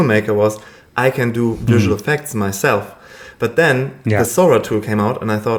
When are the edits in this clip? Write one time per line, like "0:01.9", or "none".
none